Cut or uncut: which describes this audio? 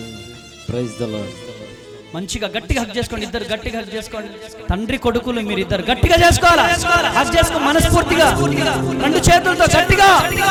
uncut